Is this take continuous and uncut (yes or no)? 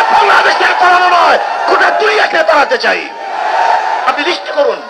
yes